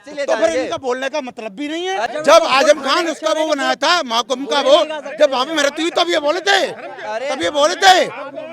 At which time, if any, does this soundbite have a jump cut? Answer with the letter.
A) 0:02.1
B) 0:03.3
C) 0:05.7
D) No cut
A